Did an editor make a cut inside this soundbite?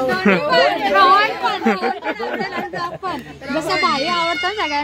no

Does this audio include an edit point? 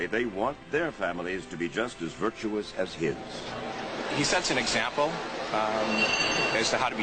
no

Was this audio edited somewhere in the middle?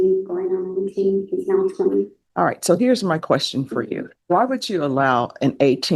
yes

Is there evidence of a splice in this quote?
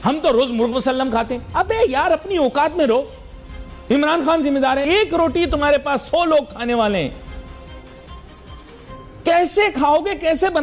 no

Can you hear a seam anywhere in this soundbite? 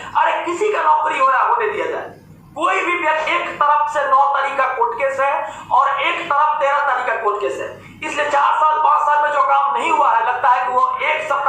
yes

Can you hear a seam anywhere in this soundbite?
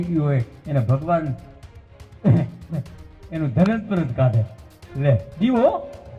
no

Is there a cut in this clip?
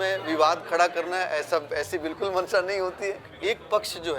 yes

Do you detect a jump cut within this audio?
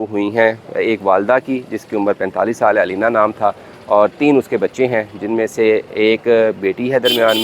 no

